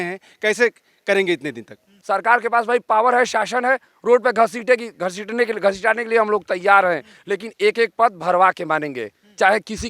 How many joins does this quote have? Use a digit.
1